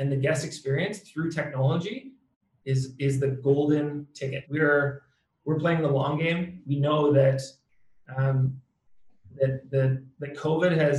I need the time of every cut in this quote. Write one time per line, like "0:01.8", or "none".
0:04.4
0:06.7